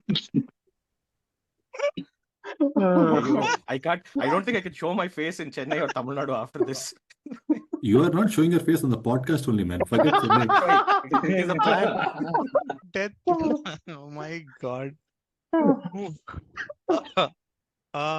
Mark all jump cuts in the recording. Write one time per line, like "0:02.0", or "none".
none